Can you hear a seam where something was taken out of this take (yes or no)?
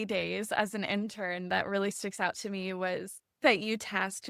yes